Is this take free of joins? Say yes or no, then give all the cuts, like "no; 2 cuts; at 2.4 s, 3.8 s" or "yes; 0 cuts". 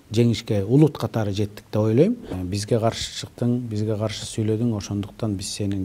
no; 1 cut; at 2.3 s